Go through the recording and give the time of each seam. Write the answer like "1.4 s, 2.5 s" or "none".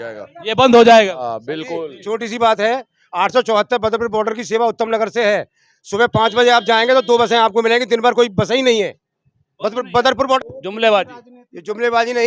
10.4 s

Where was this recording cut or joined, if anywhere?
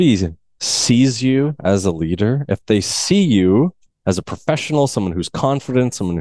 3.9 s

